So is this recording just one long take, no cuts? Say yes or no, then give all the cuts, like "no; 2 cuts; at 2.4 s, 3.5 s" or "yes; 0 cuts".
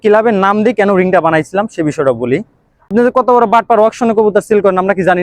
no; 1 cut; at 2.9 s